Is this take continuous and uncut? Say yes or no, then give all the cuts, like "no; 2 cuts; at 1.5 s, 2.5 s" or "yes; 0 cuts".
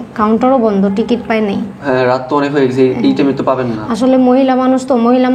yes; 0 cuts